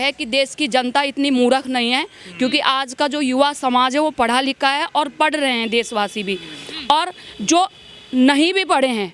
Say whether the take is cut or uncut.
uncut